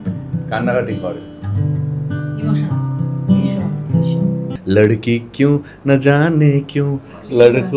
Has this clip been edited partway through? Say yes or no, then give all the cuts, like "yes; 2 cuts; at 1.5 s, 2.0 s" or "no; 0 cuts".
yes; 1 cut; at 4.5 s